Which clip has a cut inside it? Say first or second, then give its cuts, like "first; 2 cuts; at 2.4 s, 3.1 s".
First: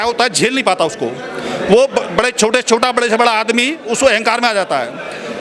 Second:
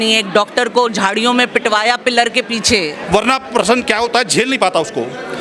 second; 1 cut; at 3.0 s